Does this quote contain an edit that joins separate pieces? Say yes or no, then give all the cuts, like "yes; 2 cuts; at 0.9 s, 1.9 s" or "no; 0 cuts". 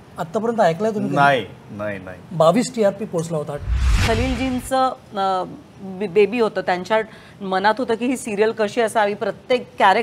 yes; 1 cut; at 3.9 s